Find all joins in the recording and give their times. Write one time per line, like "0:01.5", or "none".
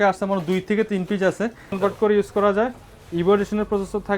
0:01.8